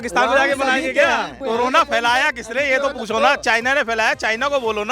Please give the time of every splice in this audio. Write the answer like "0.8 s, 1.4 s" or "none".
1.4 s